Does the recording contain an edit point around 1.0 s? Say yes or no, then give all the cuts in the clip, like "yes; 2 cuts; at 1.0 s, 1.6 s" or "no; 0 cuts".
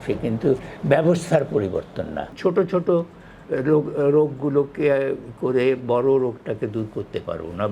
no; 1 cut; at 2.2 s